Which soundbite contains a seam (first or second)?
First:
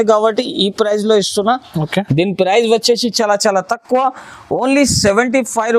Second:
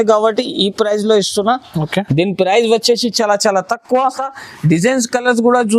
second